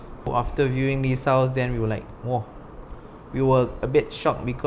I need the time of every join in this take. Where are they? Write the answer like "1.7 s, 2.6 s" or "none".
none